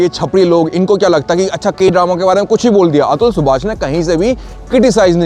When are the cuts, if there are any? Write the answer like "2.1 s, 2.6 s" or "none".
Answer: none